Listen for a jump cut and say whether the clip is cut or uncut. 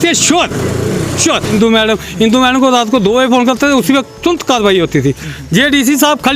cut